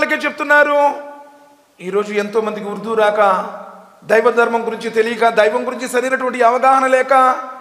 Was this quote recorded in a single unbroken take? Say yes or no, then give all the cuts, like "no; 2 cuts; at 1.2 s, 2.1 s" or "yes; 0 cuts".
yes; 0 cuts